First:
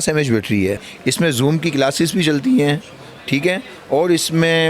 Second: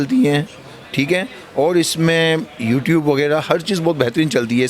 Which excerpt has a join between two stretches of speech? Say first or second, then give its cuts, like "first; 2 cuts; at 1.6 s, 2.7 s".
first; 1 cut; at 0.9 s